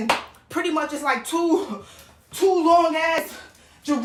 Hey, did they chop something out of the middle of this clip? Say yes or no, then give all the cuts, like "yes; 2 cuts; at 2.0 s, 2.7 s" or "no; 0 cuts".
no; 0 cuts